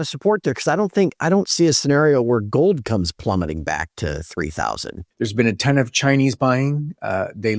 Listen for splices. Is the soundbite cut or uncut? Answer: cut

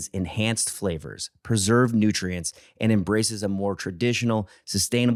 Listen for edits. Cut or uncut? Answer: uncut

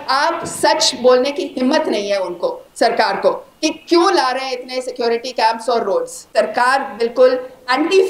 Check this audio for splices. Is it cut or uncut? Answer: cut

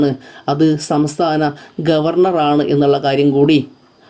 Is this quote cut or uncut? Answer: uncut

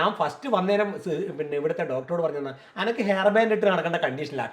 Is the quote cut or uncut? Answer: uncut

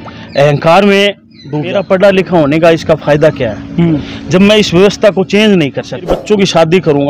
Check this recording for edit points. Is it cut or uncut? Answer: cut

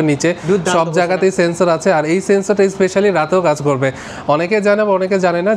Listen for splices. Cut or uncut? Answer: uncut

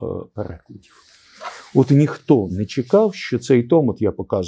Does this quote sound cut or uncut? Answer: uncut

